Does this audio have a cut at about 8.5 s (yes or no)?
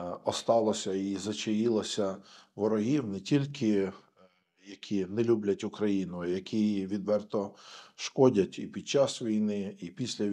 no